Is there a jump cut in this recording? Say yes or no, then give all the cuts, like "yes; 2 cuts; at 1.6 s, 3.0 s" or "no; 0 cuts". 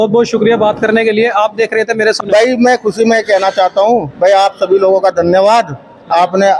yes; 1 cut; at 2.2 s